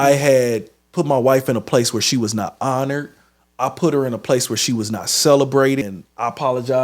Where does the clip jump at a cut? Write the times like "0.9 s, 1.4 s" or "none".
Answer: 5.8 s